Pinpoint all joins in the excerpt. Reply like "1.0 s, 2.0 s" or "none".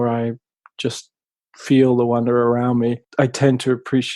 3.0 s